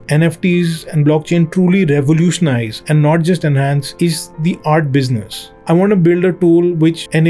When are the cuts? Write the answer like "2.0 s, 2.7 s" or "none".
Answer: 5.5 s